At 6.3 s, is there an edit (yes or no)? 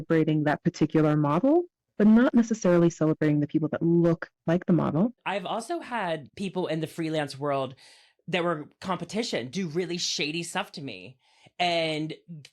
yes